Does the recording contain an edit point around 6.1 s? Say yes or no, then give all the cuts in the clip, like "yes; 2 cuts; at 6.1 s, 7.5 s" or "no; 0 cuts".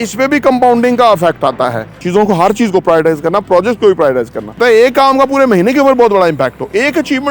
no; 2 cuts; at 1.9 s, 4.5 s